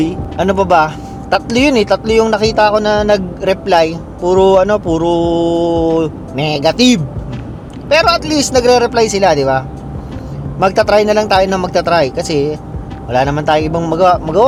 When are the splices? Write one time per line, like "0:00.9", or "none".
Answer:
none